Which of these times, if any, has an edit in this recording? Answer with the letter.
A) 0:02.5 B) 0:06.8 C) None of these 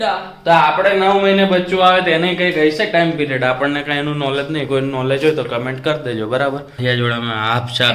B